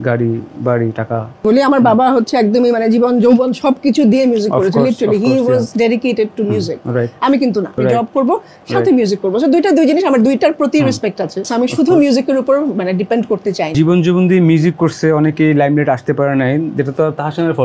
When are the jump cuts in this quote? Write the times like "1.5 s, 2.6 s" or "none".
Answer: 1.4 s, 7.8 s, 11.5 s, 13.7 s